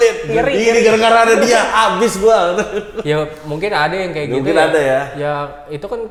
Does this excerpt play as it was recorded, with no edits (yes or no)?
yes